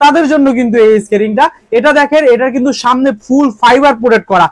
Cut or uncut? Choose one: uncut